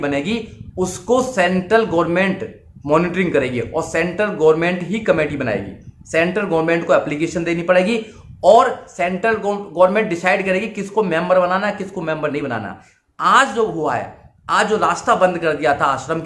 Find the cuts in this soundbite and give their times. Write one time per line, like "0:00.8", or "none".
none